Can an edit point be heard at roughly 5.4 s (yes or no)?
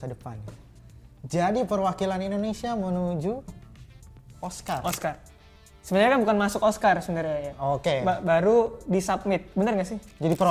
no